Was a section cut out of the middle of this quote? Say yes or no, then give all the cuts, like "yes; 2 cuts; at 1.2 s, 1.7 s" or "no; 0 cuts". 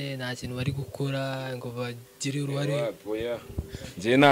no; 0 cuts